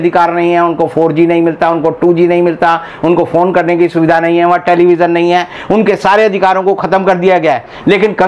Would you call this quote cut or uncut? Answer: uncut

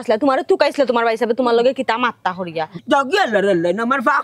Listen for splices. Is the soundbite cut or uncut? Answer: cut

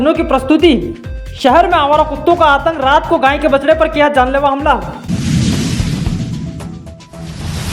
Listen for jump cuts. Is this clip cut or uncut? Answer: cut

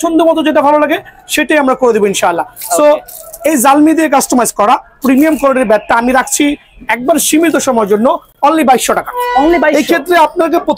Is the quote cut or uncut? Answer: uncut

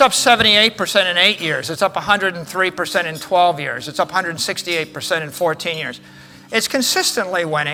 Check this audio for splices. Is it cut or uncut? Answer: uncut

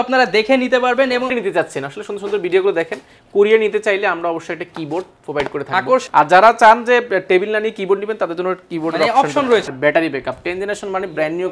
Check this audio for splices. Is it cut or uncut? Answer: cut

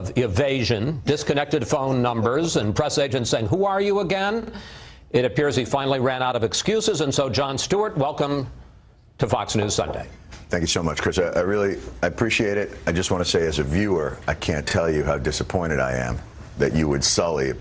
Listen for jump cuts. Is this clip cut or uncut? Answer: uncut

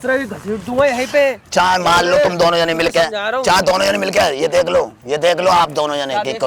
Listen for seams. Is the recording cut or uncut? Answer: uncut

